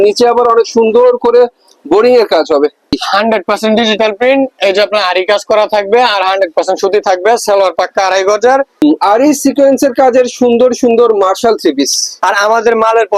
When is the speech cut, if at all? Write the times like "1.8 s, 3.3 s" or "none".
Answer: 3.0 s, 8.8 s, 12.1 s